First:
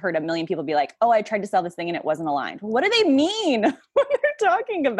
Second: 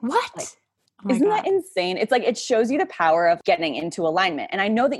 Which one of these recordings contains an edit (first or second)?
second